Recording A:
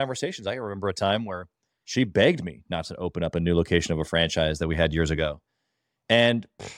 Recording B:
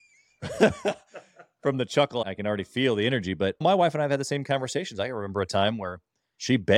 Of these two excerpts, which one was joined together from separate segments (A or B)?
B